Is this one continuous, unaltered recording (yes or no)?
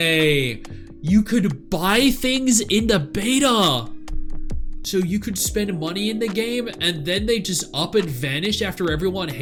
yes